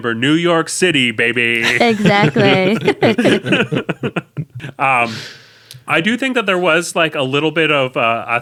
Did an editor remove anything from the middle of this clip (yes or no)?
no